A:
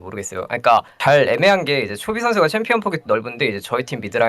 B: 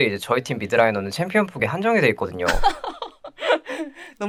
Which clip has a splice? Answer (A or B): A